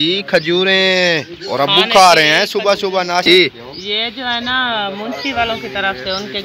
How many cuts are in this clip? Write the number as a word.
one